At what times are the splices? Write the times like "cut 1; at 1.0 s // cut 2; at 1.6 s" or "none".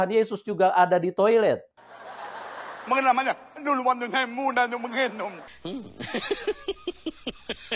cut 1; at 1.5 s